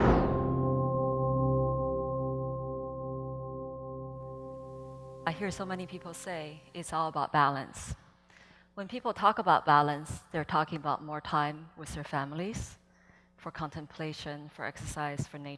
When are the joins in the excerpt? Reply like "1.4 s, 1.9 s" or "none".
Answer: none